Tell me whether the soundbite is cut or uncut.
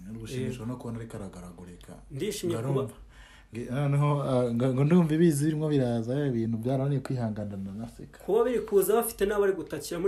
uncut